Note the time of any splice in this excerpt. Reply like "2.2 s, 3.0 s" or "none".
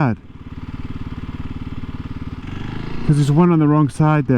2.4 s